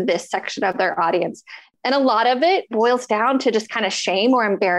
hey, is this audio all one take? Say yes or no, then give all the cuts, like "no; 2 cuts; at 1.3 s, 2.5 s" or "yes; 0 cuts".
no; 1 cut; at 2.7 s